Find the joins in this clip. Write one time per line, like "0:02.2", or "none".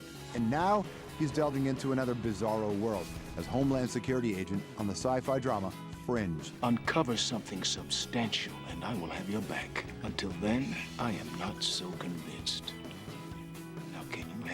0:01.3